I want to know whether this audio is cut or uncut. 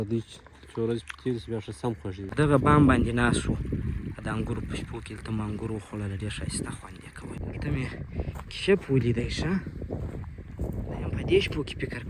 cut